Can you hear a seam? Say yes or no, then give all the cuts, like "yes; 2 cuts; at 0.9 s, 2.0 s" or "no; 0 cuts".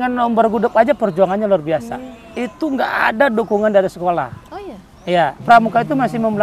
yes; 1 cut; at 5.4 s